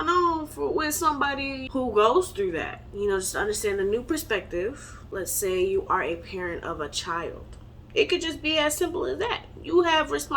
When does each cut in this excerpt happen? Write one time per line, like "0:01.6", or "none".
0:01.6
0:05.2